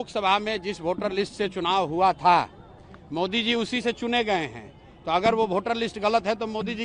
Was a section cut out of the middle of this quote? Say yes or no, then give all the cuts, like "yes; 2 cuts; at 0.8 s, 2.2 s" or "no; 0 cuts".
no; 0 cuts